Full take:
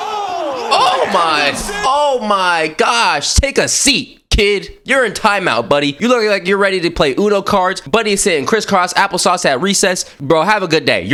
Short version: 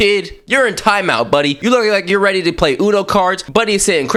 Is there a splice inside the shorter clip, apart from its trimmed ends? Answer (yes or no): no